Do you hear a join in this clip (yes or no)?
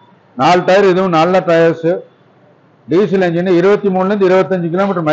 no